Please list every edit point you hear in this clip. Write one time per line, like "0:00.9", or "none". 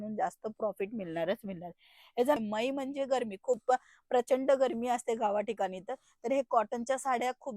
0:02.4